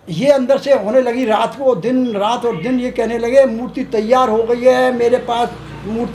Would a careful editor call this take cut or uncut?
uncut